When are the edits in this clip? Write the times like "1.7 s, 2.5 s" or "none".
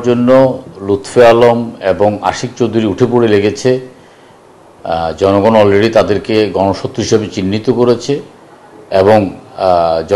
none